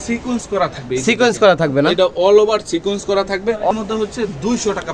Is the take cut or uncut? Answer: cut